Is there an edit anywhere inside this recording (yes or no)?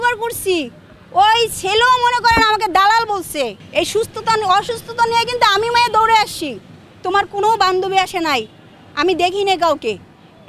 yes